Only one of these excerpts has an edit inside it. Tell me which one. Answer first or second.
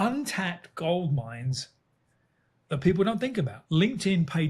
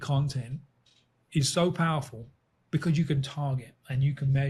first